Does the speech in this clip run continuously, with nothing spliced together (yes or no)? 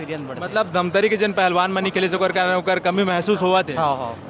yes